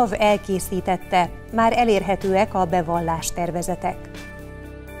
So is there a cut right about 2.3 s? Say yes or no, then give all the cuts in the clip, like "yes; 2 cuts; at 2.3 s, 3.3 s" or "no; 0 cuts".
no; 1 cut; at 4.0 s